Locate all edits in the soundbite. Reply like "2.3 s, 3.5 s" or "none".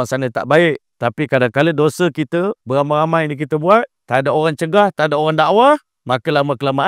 0.9 s, 2.6 s, 4.0 s, 5.9 s